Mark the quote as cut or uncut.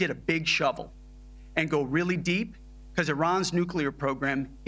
uncut